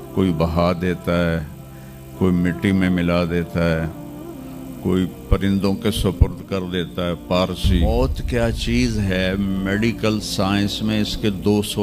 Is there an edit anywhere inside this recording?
yes; 1 cut; at 7.8 s

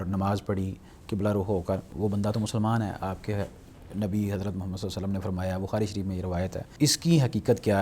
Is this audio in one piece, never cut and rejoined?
no; 2 cuts; at 1.9 s, 6.7 s

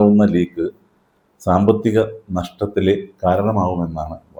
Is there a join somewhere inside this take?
no; 0 cuts

